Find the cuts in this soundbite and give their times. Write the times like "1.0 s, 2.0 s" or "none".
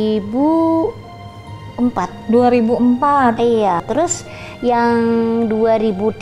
3.9 s